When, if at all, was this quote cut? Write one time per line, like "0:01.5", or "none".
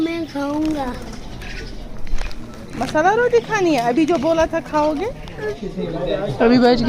0:05.6